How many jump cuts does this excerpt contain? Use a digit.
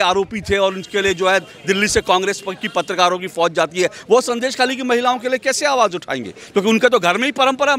0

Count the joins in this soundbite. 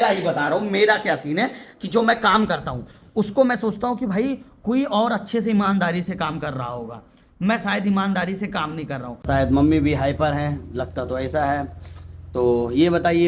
2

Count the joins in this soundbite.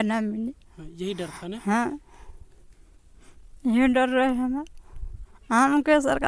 0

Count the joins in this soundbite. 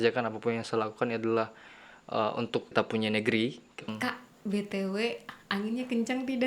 2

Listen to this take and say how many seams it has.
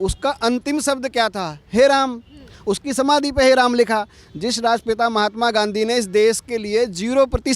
0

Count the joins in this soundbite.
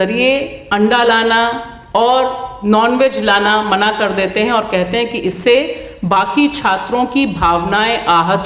0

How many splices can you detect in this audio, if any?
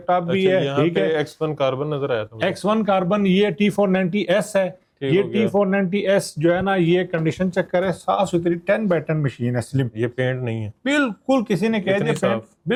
0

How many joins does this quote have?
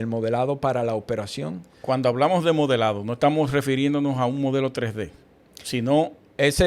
0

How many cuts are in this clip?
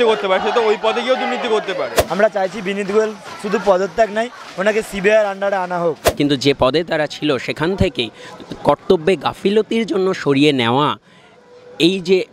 2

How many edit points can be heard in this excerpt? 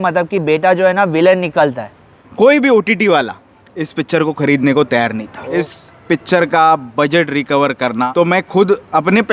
3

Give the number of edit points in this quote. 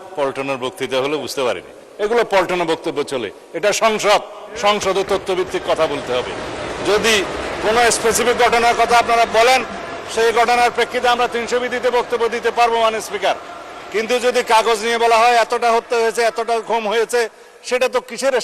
1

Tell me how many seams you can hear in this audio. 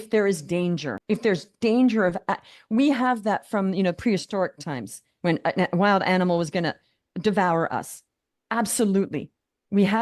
1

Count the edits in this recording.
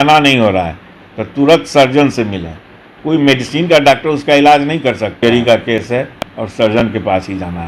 2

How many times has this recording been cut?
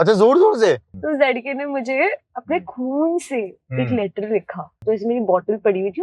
2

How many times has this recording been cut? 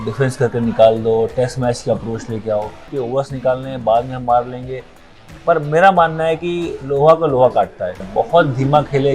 2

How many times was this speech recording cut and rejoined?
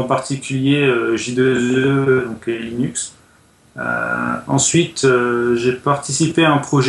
0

